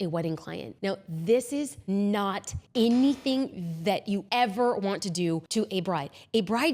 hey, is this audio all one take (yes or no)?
no